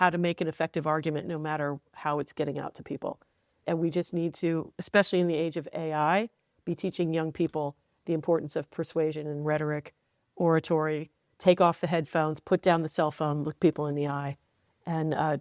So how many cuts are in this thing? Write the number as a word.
one